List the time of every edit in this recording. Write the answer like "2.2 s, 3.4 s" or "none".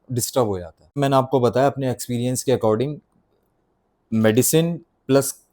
0.9 s

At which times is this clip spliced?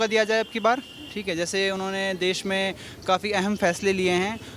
none

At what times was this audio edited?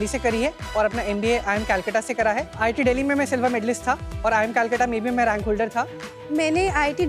2.6 s, 4.1 s, 6.1 s

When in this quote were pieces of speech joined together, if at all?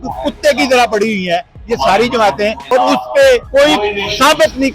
2.6 s, 3.5 s

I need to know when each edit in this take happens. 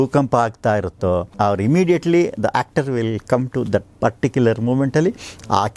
1.3 s

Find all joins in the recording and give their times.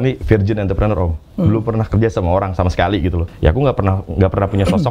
3.2 s

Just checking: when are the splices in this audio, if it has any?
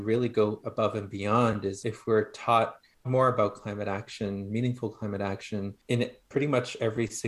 1.8 s, 3.0 s, 5.8 s

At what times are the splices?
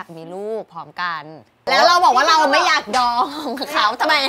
none

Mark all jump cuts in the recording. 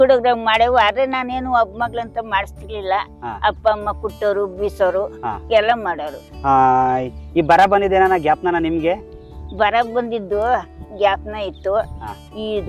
none

